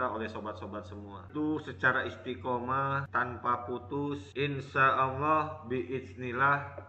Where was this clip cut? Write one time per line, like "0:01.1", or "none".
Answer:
0:01.3